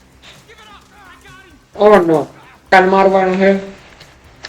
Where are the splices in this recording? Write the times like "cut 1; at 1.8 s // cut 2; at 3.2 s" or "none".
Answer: cut 1; at 2.7 s